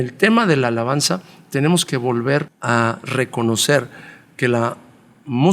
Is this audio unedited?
no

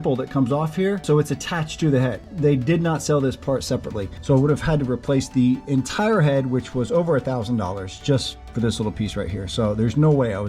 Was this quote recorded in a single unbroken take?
no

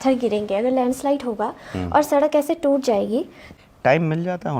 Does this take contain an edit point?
yes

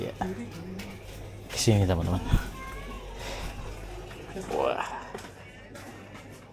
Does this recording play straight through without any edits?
yes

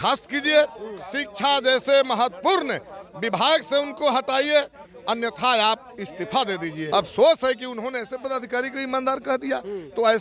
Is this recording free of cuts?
no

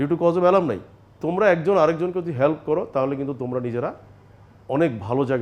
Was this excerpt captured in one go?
no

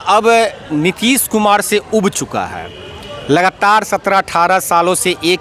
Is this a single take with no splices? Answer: yes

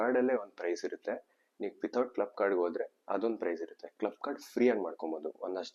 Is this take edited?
no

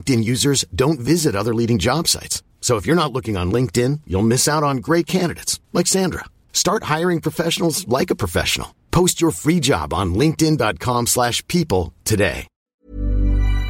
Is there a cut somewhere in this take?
yes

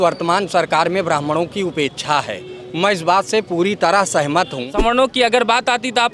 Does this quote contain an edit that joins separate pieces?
yes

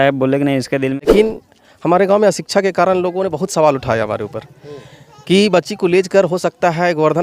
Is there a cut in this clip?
yes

